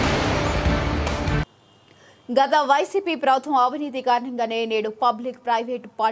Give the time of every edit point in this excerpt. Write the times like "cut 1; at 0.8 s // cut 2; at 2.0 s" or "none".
cut 1; at 1.6 s